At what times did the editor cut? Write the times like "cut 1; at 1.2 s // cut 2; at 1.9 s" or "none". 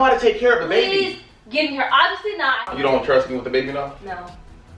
cut 1; at 2.6 s